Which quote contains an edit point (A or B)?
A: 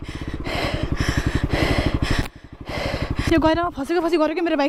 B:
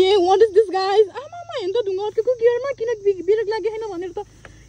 A